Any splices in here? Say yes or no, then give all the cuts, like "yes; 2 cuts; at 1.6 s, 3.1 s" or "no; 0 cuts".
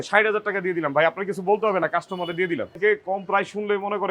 yes; 1 cut; at 2.7 s